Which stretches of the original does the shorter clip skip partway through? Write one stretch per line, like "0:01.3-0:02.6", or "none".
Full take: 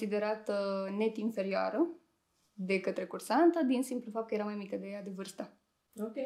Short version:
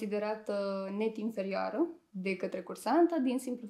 0:02.1-0:02.5

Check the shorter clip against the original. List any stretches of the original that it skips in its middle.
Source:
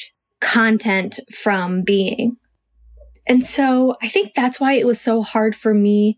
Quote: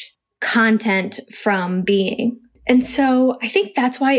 0:02.5-0:03.1

